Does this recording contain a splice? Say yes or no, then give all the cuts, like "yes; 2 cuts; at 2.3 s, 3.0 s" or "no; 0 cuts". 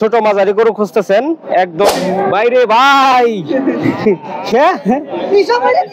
yes; 1 cut; at 1.9 s